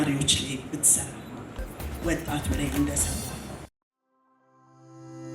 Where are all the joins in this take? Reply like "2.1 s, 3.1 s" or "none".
3.8 s